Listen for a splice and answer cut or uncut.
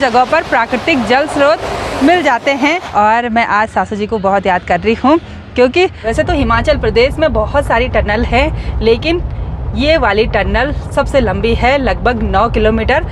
cut